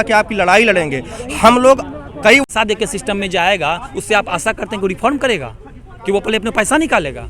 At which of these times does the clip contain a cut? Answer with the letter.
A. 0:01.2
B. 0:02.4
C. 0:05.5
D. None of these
B